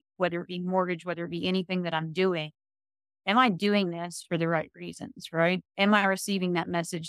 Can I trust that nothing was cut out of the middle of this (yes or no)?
yes